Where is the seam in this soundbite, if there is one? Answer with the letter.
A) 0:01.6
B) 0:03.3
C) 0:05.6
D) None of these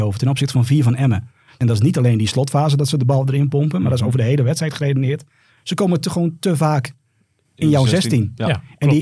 A